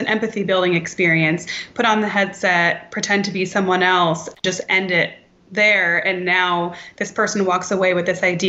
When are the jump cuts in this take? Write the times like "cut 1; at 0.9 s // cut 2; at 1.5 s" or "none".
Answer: none